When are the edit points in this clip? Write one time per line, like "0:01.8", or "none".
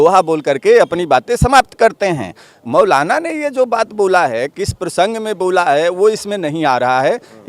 none